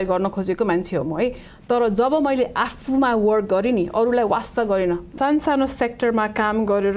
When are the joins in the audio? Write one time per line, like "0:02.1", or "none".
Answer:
0:05.1